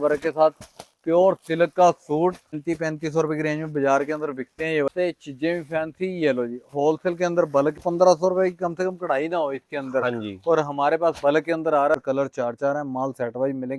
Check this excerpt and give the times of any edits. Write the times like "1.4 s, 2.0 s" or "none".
2.5 s, 4.9 s, 7.8 s, 11.9 s